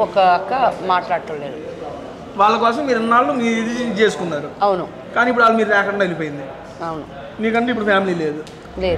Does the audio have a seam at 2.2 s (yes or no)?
no